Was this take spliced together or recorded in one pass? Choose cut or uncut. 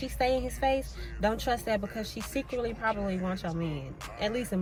uncut